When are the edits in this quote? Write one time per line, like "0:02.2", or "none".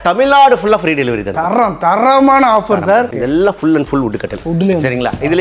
0:01.3
0:03.1